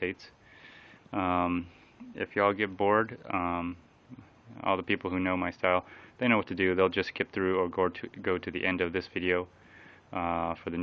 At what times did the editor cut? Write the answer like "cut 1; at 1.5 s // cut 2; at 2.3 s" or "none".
cut 1; at 9.2 s